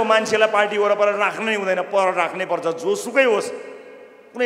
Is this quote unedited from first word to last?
yes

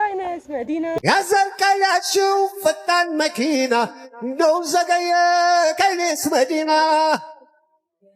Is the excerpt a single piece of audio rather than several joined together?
no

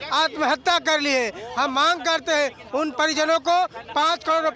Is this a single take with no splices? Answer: yes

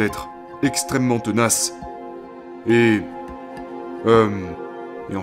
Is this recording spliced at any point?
no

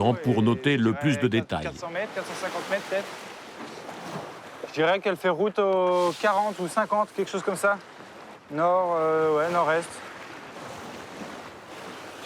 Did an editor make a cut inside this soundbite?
no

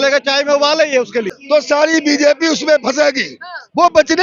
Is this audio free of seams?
no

